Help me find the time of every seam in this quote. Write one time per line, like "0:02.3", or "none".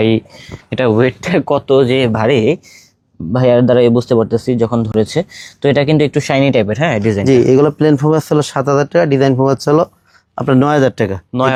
none